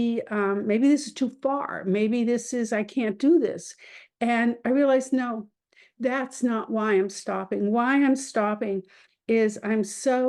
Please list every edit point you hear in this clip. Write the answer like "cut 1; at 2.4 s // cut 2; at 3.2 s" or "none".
none